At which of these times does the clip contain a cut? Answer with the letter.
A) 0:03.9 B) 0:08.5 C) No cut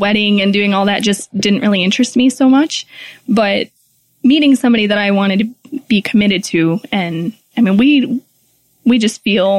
C